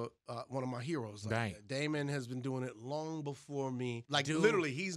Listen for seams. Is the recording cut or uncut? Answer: cut